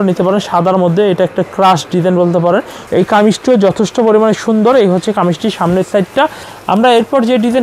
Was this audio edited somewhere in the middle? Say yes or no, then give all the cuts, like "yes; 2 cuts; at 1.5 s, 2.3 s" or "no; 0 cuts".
yes; 2 cuts; at 2.8 s, 6.5 s